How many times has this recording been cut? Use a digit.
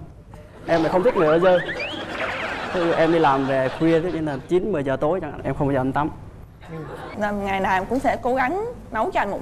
1